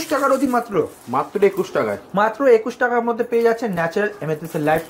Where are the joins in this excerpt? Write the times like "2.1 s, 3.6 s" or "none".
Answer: none